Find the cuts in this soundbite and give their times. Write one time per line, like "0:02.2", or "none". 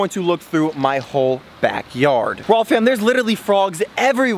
0:02.3